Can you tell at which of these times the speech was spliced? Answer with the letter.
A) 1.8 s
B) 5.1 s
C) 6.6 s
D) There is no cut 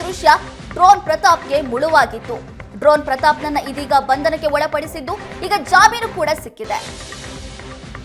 C